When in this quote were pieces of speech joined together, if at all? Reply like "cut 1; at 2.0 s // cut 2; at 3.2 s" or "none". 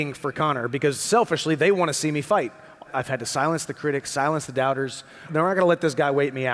cut 1; at 2.9 s // cut 2; at 5.3 s